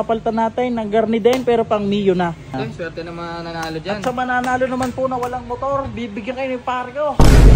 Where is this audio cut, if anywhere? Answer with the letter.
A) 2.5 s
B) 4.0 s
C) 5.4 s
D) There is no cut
A